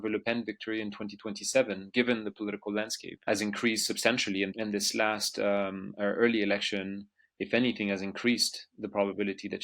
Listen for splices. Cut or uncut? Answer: cut